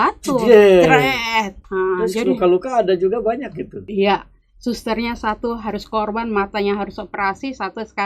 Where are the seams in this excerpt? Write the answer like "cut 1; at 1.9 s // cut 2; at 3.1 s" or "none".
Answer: cut 1; at 1.6 s // cut 2; at 3.8 s